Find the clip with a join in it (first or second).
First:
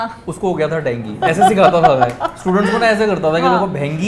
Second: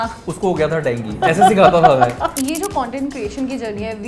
second